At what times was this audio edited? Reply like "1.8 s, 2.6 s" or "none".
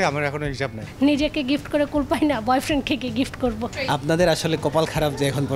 0.8 s, 3.7 s